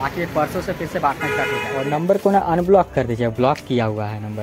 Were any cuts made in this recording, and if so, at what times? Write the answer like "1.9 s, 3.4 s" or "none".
1.9 s